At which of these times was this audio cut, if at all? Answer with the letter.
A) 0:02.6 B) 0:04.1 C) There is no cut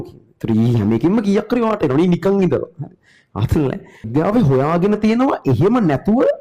B